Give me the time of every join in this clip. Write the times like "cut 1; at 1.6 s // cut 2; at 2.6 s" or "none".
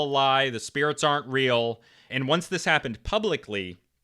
cut 1; at 2.1 s